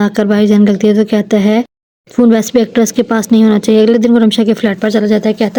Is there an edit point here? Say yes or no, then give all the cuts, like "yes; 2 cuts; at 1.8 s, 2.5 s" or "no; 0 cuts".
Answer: no; 0 cuts